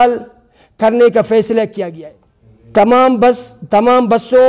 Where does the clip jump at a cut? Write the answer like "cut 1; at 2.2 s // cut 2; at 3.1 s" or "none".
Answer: cut 1; at 1.8 s